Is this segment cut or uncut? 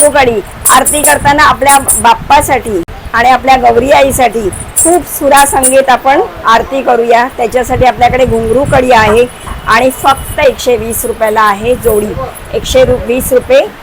uncut